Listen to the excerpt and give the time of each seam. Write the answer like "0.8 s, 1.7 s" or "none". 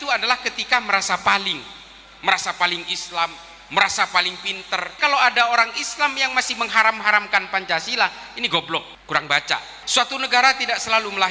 4.9 s, 8.9 s, 9.8 s